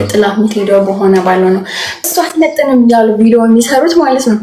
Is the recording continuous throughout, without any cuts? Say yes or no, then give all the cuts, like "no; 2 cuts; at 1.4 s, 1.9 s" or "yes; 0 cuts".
no; 1 cut; at 2.0 s